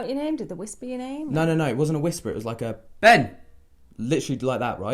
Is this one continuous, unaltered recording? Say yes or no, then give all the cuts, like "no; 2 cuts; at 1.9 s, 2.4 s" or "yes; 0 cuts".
yes; 0 cuts